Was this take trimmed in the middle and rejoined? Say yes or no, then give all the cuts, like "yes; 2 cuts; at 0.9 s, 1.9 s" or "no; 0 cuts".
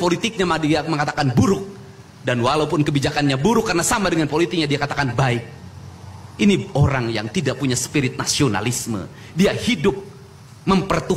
no; 0 cuts